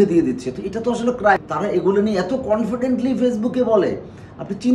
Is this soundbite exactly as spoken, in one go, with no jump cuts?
no; 1 cut; at 1.4 s

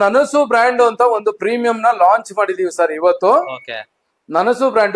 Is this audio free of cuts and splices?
yes; 0 cuts

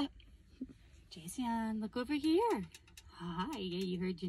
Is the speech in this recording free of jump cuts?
yes; 0 cuts

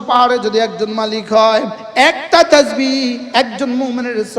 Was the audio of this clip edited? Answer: yes; 1 cut; at 1.8 s

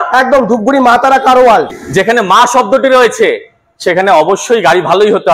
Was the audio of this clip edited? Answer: yes; 1 cut; at 1.7 s

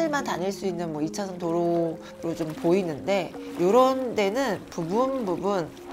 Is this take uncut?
yes; 0 cuts

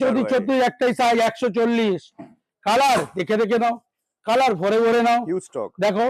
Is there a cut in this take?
no; 0 cuts

